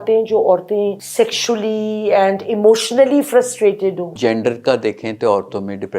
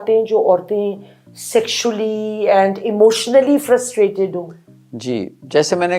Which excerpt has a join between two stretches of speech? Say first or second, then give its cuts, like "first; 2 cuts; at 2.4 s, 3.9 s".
first; 2 cuts; at 1.0 s, 4.1 s